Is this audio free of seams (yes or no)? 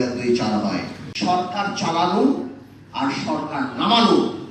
no